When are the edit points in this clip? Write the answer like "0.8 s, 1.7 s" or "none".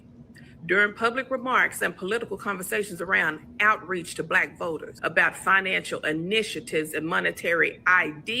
4.9 s